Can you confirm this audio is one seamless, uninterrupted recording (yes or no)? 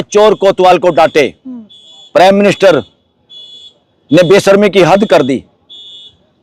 yes